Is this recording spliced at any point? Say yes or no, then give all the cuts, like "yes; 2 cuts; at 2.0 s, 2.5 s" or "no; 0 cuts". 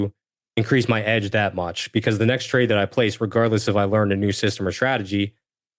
no; 0 cuts